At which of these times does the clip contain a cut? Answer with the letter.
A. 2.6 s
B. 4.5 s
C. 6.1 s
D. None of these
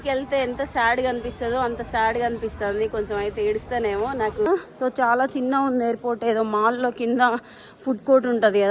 B